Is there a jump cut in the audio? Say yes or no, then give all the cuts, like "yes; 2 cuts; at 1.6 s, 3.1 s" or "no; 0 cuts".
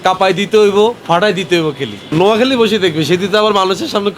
yes; 1 cut; at 1.9 s